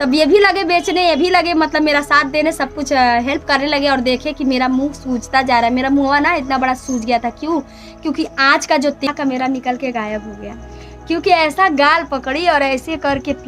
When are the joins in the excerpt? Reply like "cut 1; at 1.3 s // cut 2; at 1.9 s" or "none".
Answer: cut 1; at 9.0 s